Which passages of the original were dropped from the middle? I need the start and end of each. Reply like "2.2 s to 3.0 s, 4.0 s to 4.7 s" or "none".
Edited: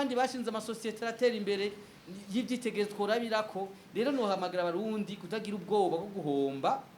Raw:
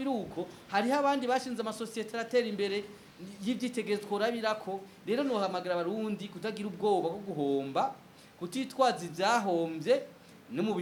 none